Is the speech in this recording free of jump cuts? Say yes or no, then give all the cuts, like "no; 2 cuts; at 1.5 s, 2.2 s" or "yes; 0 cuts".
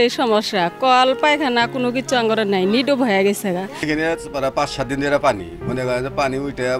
no; 1 cut; at 3.8 s